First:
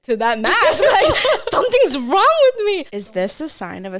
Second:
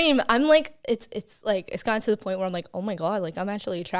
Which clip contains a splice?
first; 1 cut; at 3.0 s

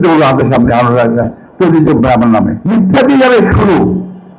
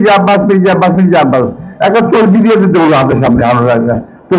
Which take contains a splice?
first; 1 cut; at 2.6 s

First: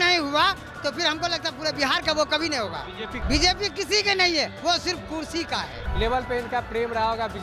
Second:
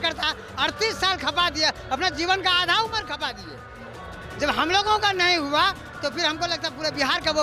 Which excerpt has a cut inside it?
first; 2 cuts; at 3.2 s, 5.8 s

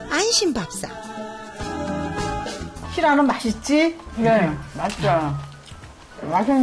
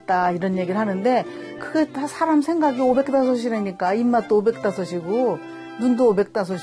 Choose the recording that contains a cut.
first; 1 cut; at 2.8 s

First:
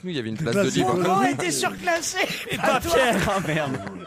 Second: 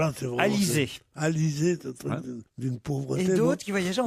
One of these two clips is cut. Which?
first; 1 cut; at 2.4 s

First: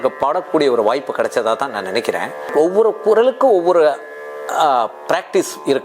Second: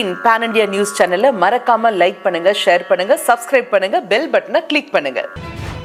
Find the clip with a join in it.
first; 1 cut; at 2.5 s

